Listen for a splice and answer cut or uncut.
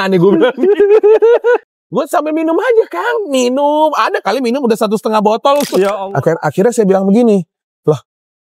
cut